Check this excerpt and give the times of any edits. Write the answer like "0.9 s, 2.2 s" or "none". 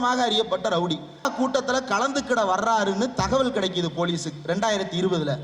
1.3 s